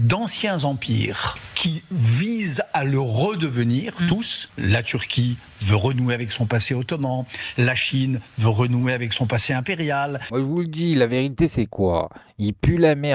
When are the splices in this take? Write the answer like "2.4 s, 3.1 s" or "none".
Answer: 1.5 s, 4.5 s, 10.2 s